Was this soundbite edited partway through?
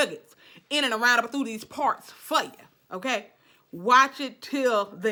no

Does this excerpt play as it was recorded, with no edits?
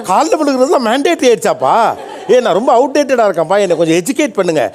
yes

